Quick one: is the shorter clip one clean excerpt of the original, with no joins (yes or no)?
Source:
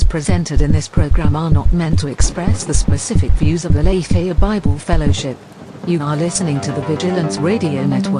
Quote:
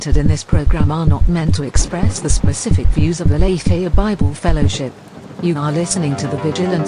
yes